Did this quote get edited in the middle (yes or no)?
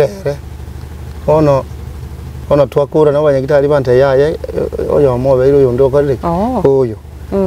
yes